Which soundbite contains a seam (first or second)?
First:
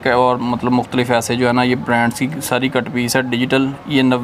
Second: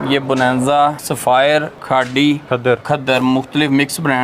second